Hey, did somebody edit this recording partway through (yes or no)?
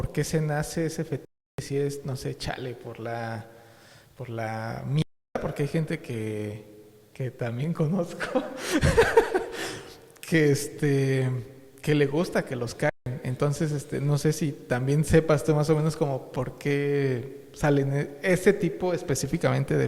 no